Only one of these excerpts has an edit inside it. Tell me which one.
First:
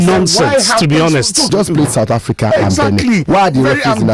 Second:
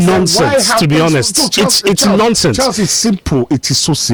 first; 1 cut; at 1.5 s

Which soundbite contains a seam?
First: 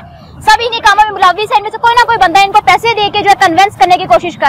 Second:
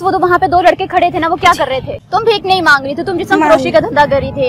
second; 1 cut; at 2.0 s

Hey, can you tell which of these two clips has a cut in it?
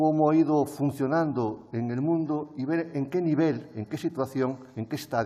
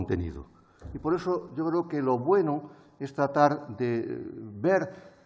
second; 1 cut; at 4.2 s

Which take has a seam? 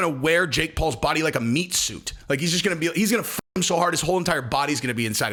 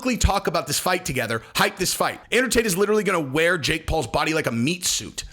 second; 1 cut; at 2.2 s

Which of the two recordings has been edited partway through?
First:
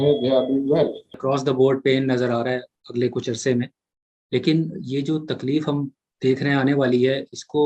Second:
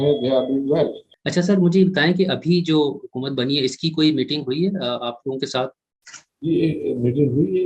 first; 1 cut; at 1.2 s

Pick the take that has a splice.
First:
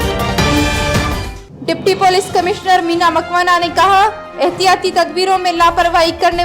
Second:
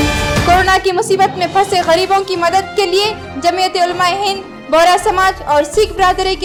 first; 1 cut; at 1.2 s

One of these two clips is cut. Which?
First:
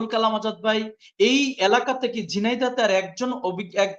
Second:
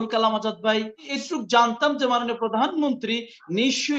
second; 1 cut; at 1.1 s

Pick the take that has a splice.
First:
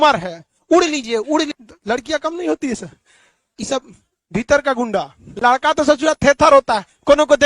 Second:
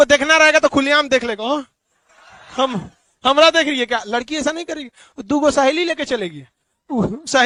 first; 2 cuts; at 1.6 s, 5.2 s

